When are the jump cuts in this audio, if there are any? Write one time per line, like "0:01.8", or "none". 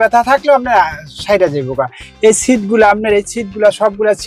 none